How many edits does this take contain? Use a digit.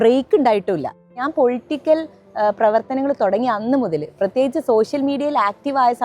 1